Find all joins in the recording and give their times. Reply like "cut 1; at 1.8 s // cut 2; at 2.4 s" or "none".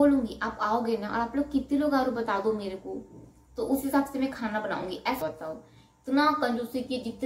cut 1; at 5.2 s